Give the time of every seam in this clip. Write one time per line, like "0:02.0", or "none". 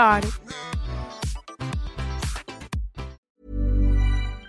0:03.2